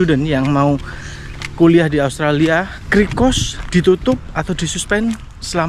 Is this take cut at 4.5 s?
no; 1 cut; at 2.8 s

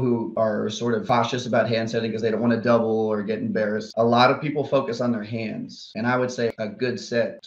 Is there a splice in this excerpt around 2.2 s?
no; 3 cuts; at 3.9 s, 5.9 s, 6.5 s

